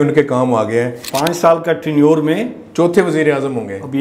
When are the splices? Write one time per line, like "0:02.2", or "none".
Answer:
0:01.1